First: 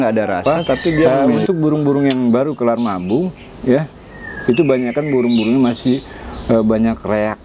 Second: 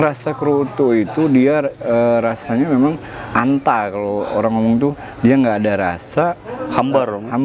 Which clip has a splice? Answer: first; 1 cut; at 1.3 s

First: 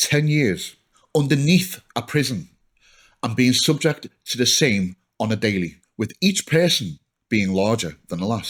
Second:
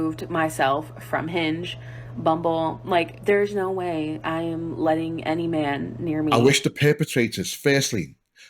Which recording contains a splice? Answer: second; 2 cuts; at 3.1 s, 6.3 s

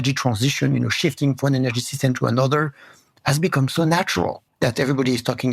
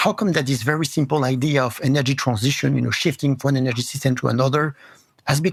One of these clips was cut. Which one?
first; 1 cut; at 4.4 s

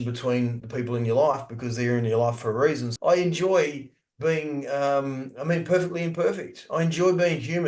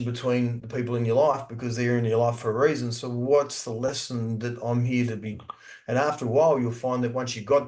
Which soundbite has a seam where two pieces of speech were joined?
first; 1 cut; at 2.9 s

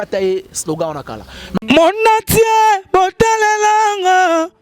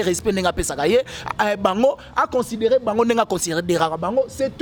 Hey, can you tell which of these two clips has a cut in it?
first; 1 cut; at 1.6 s

